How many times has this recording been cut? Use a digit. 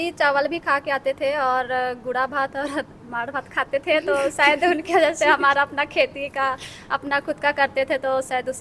0